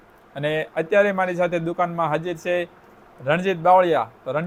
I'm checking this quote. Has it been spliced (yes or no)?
no